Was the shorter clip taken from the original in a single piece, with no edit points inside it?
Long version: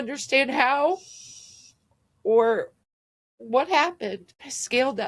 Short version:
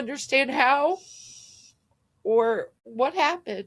no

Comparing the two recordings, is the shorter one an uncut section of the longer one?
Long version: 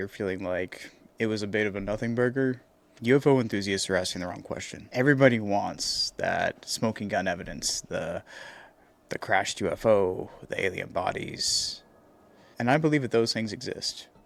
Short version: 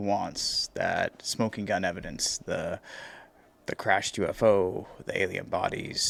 yes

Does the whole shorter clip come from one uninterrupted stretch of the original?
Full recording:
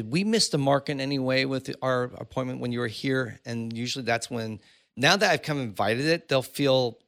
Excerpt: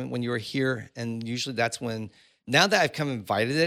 yes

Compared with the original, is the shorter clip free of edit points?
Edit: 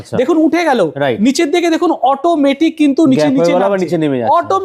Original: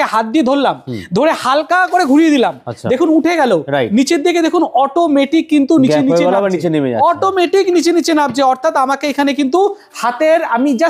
yes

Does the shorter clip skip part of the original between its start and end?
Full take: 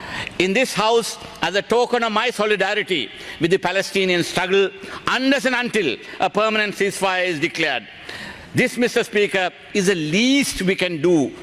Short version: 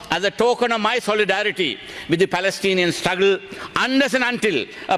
no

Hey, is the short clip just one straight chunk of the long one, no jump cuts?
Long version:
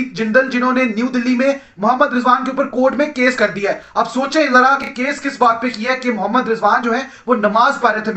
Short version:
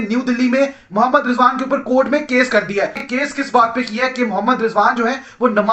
no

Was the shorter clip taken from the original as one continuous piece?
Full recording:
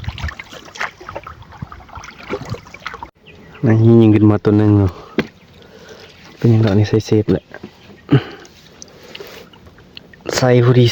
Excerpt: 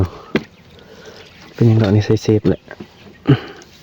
yes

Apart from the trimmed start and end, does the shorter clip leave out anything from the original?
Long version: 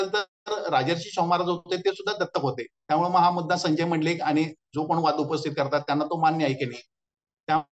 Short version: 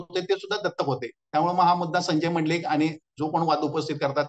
no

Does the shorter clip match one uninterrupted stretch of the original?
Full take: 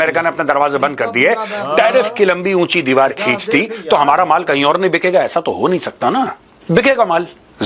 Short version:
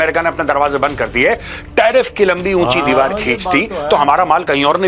yes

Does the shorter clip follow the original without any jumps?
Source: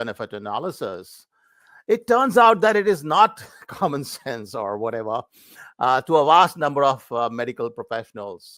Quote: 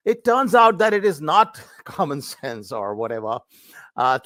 yes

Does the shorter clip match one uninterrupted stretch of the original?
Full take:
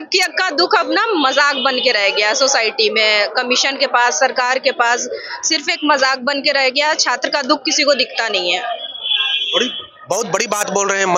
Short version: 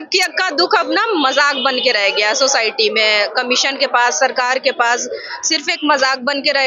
yes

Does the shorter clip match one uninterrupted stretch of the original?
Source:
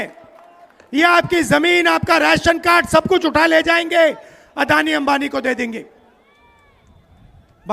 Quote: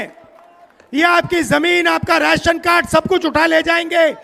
yes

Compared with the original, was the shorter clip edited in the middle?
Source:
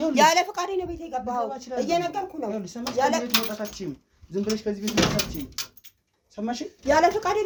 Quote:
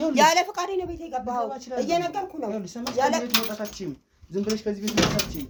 no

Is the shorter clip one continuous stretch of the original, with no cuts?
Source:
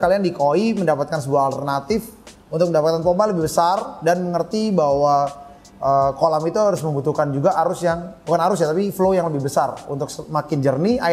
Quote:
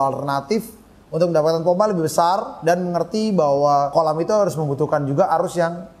no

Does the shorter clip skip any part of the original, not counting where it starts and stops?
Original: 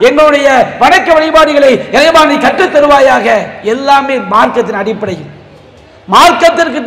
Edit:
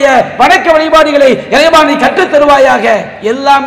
no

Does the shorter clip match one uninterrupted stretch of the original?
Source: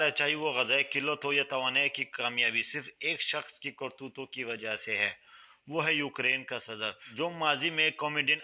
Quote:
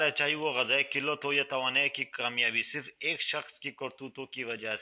yes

